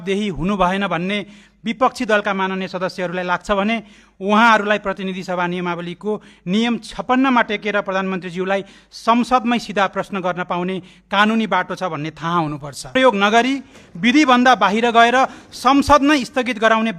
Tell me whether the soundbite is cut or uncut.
cut